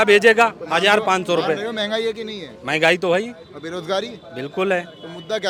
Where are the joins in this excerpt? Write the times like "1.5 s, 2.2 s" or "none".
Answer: none